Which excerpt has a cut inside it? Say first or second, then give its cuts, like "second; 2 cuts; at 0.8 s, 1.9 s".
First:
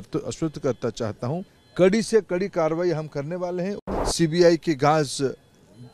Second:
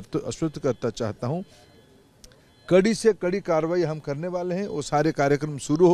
first; 2 cuts; at 1.6 s, 3.8 s